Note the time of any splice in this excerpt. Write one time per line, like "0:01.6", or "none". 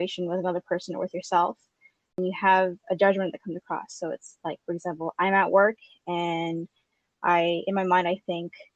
0:02.1